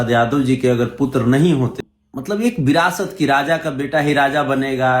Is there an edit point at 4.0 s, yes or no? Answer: no